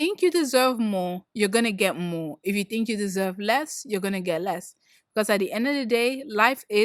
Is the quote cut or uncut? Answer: uncut